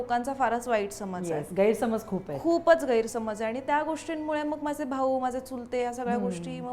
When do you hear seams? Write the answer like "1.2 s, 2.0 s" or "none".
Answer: none